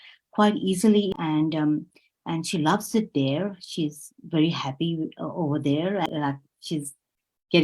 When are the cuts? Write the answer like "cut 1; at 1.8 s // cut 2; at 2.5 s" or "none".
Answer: cut 1; at 1.1 s // cut 2; at 6.1 s